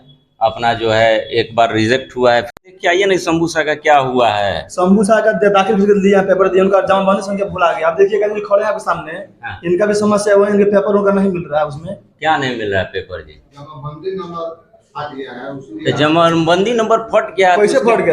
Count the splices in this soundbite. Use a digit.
1